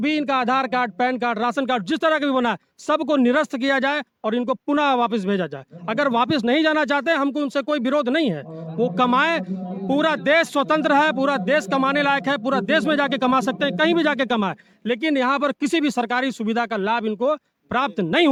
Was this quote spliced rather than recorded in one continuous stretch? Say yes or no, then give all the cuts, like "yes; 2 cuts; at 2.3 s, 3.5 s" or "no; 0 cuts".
no; 0 cuts